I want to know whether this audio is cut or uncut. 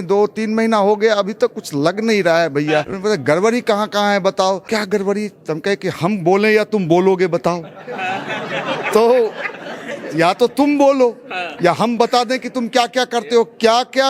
cut